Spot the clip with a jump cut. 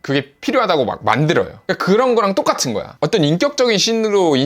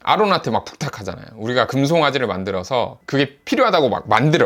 first; 1 cut; at 2.9 s

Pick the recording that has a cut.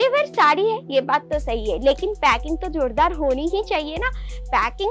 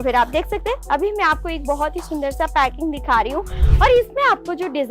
second; 1 cut; at 3.6 s

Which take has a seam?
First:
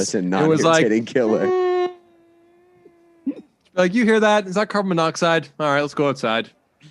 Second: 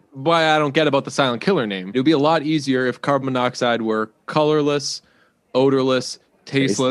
second; 1 cut; at 1.9 s

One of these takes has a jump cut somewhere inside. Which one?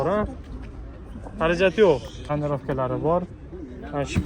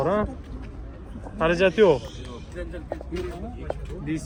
first; 1 cut; at 2.3 s

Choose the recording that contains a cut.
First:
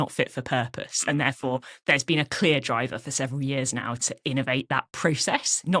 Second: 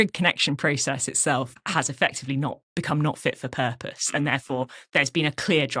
second; 1 cut; at 1.5 s

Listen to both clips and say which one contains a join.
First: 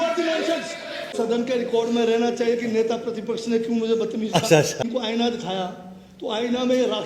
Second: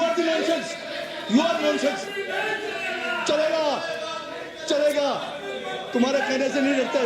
first; 2 cuts; at 1.1 s, 4.8 s

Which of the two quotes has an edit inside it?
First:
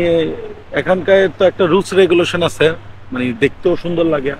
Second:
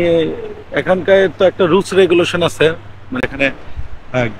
second; 1 cut; at 3.2 s

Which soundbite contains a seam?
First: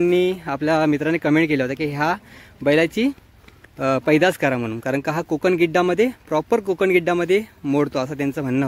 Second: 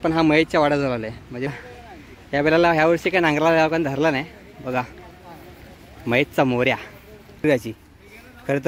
second; 2 cuts; at 1.5 s, 7.4 s

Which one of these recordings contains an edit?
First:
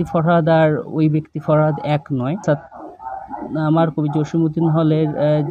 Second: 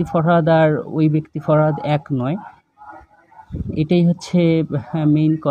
first; 1 cut; at 2.4 s

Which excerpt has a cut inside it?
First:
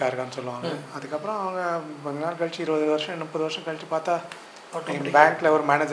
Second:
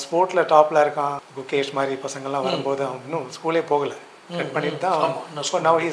second; 1 cut; at 1.3 s

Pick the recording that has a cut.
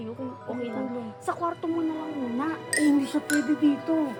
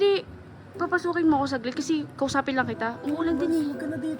second; 1 cut; at 3.0 s

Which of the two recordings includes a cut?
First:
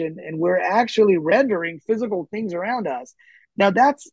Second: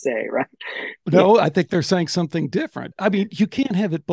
second; 2 cuts; at 1.0 s, 2.8 s

